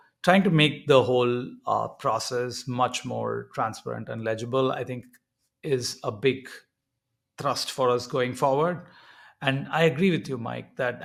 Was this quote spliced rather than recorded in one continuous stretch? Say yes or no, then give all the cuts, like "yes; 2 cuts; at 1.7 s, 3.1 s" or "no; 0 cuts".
no; 0 cuts